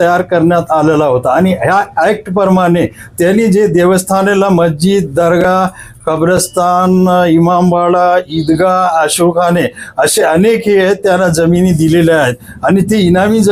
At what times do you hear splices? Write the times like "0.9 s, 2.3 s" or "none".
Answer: none